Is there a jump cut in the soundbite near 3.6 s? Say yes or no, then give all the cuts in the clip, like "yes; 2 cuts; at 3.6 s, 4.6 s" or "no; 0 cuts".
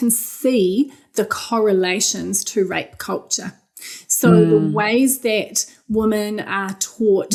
no; 0 cuts